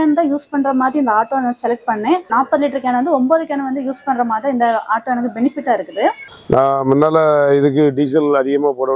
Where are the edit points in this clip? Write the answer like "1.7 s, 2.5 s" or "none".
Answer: 2.3 s, 6.2 s

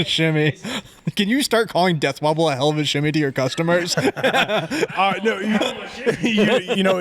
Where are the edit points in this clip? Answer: 0.9 s

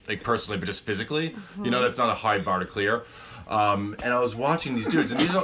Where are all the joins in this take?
none

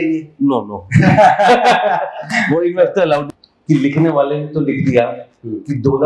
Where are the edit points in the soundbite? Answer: 3.3 s

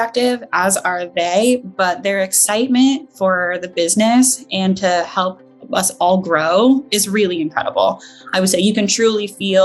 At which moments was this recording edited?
none

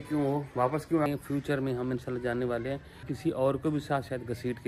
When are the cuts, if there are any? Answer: 1.1 s, 3.1 s

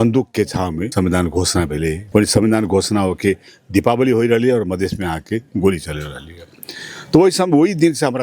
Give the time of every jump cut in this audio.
0.9 s, 2.0 s

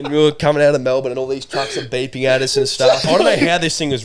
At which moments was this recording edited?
3.0 s

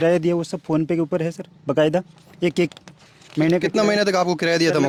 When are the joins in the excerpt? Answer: none

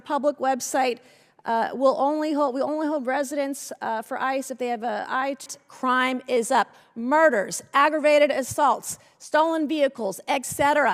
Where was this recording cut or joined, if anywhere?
5.5 s

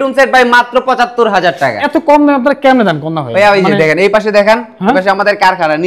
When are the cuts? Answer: 1.8 s

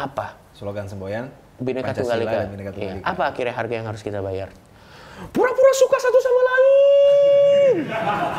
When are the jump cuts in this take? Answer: none

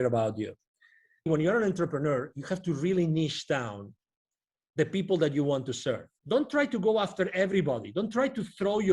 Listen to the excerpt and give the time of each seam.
1.3 s, 6.1 s

